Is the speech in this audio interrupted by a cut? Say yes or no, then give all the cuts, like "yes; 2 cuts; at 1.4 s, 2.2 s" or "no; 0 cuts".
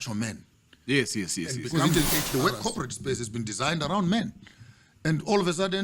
yes; 1 cut; at 1.7 s